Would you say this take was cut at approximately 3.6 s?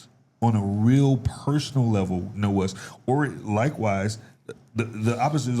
no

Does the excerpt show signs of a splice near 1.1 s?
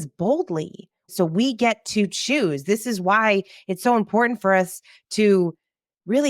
yes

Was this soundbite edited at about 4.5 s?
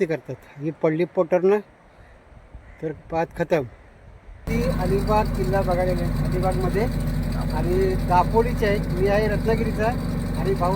yes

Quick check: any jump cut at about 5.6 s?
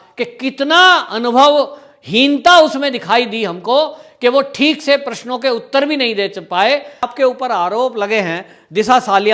no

